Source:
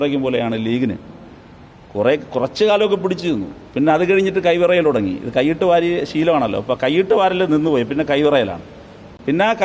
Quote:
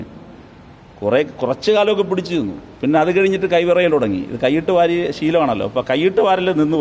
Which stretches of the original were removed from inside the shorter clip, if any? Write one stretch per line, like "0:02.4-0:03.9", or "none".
none